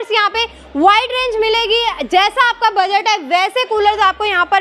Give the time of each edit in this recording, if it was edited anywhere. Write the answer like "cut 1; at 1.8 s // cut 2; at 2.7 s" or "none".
none